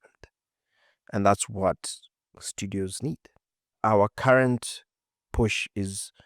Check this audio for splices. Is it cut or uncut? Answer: cut